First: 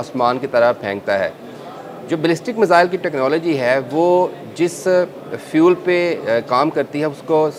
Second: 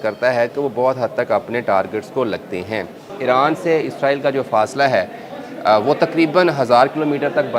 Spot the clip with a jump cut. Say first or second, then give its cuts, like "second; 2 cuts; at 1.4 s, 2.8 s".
second; 1 cut; at 3.0 s